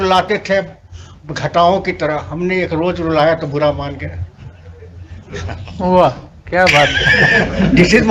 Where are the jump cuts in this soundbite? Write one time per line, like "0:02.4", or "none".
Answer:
none